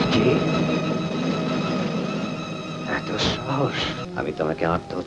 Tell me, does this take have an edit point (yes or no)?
yes